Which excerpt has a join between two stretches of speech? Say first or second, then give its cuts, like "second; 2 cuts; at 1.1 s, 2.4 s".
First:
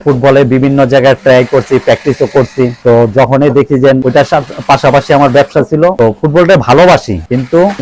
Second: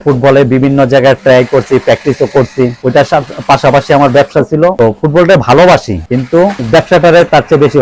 second; 1 cut; at 2.8 s